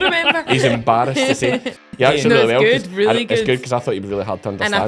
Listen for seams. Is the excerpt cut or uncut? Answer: cut